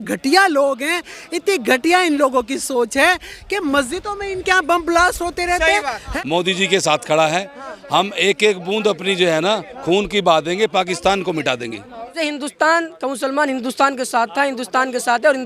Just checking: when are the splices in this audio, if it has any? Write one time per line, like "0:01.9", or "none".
0:06.0
0:12.1